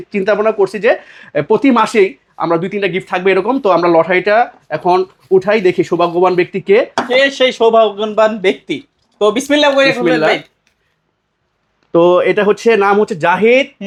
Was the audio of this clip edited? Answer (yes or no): no